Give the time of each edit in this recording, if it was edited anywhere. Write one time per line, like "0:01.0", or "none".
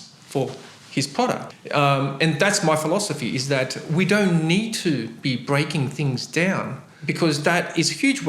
0:01.5
0:06.8